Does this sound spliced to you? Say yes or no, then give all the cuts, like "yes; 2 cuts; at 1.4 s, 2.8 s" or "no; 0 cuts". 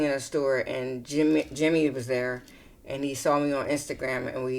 no; 0 cuts